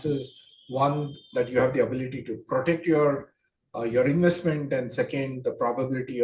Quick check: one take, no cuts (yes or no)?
yes